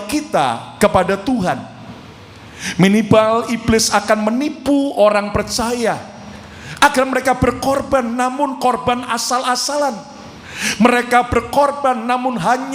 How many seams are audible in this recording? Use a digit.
0